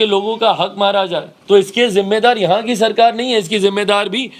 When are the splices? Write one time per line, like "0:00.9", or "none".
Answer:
0:01.3

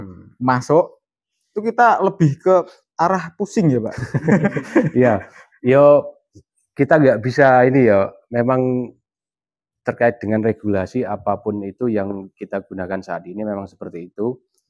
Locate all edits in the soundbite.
none

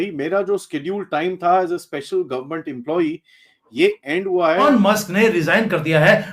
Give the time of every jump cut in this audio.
0:04.7

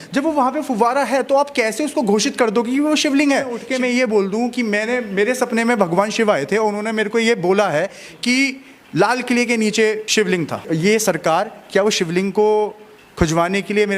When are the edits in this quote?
0:03.6
0:10.6

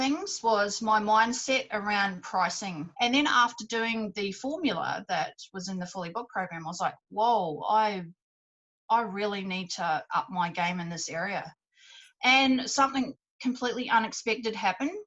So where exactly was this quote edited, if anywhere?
0:02.8

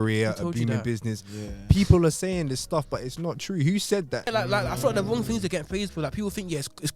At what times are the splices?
0:04.3

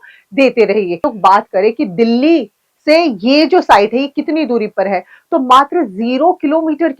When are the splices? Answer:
0:01.1

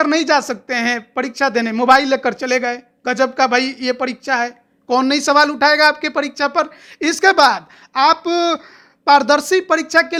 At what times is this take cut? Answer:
none

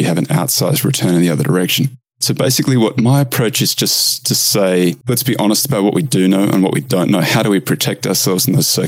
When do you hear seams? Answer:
0:05.0

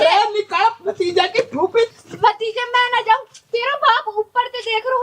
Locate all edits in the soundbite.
0:01.9

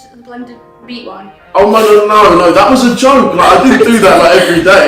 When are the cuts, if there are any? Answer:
none

